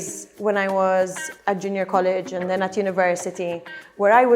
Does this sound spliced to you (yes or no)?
yes